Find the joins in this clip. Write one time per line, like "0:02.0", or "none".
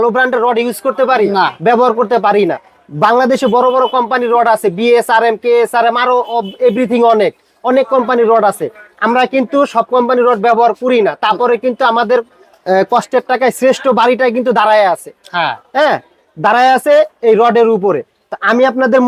none